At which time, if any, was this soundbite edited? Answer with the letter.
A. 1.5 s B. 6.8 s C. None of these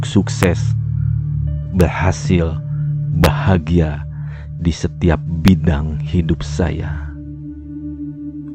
B